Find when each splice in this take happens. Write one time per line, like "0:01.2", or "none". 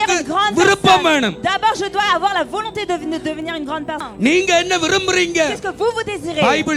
0:04.0

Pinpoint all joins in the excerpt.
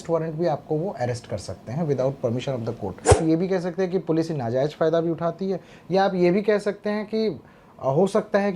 0:03.2

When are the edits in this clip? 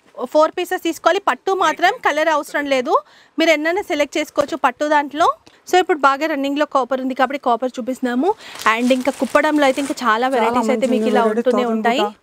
0:05.5

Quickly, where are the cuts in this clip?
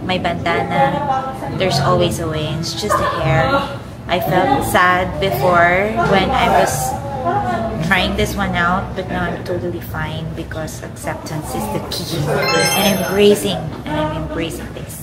none

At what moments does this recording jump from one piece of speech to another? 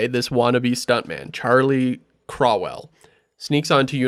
none

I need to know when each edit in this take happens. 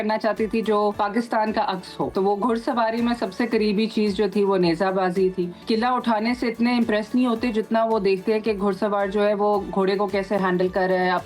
0:00.9
0:02.1
0:05.6

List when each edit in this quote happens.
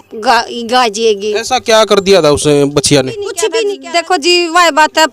0:03.8

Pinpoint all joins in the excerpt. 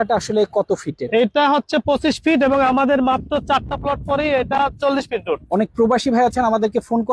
0:05.4

